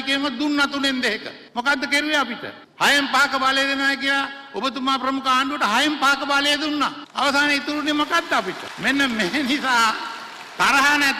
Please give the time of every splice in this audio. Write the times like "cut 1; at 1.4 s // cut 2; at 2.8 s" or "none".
none